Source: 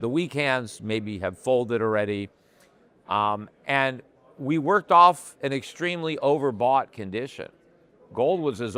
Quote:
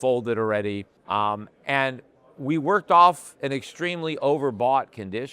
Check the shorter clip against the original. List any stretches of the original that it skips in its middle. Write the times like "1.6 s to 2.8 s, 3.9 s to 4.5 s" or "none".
2.4 s to 2.9 s